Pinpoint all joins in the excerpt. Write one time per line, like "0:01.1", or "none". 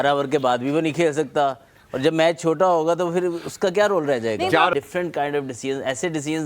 0:04.7